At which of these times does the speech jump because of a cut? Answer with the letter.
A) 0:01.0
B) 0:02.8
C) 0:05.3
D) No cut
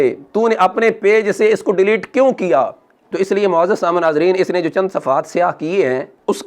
B